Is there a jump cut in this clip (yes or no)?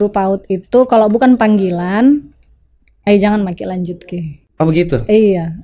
no